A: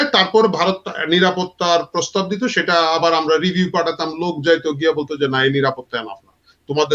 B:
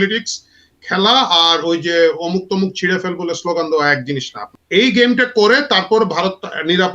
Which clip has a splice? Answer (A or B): B